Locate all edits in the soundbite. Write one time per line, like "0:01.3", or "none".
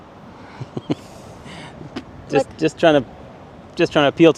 none